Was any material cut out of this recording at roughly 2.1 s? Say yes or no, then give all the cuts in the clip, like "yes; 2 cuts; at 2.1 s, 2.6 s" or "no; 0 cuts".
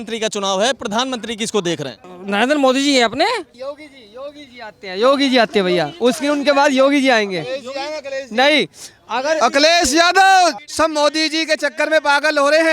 yes; 3 cuts; at 2.1 s, 3.5 s, 10.6 s